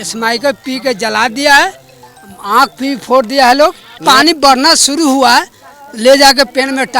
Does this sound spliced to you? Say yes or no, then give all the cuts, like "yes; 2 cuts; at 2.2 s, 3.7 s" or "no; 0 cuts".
yes; 1 cut; at 4.0 s